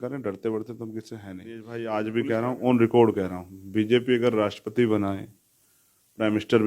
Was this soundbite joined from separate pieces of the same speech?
yes; 1 cut; at 1.8 s

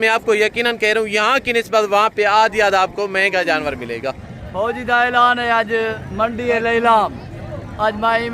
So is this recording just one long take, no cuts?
no; 2 cuts; at 4.3 s, 6.0 s

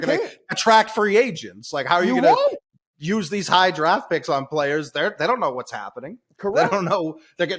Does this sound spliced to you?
no; 0 cuts

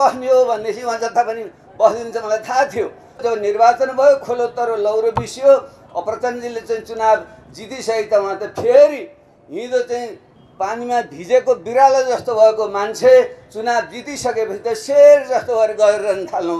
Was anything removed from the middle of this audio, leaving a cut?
yes; 1 cut; at 3.2 s

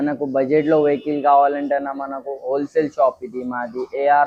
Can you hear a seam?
no; 0 cuts

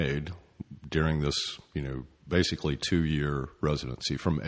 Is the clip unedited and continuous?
yes; 0 cuts

